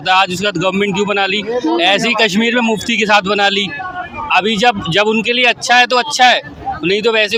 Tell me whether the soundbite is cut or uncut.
uncut